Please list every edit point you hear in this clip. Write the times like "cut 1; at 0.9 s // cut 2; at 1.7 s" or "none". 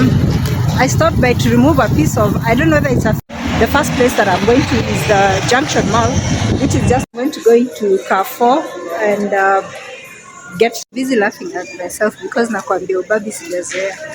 cut 1; at 3.2 s // cut 2; at 7.0 s // cut 3; at 10.8 s

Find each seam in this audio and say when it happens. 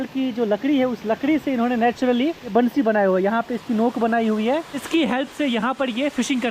cut 1; at 2.5 s // cut 2; at 4.8 s

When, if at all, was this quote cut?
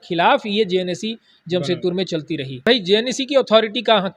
cut 1; at 2.6 s

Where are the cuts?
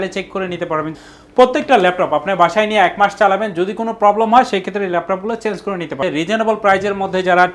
cut 1; at 0.9 s // cut 2; at 6.0 s

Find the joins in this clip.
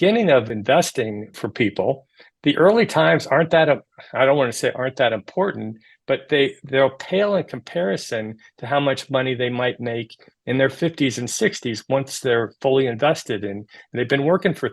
cut 1; at 1.0 s

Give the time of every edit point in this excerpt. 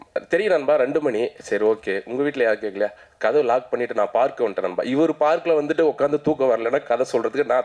none

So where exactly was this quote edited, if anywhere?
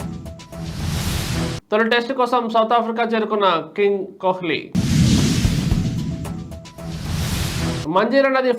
cut 1; at 1.5 s

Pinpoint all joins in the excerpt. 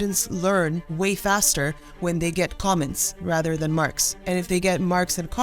cut 1; at 0.8 s // cut 2; at 4.1 s

